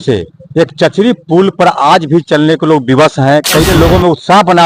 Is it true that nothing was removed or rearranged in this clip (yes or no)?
no